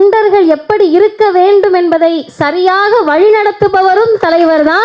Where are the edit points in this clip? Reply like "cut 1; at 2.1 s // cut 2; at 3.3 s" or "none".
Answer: none